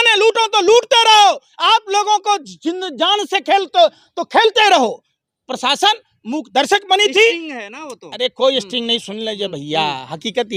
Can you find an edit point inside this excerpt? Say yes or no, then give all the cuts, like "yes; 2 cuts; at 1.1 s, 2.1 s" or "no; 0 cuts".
no; 0 cuts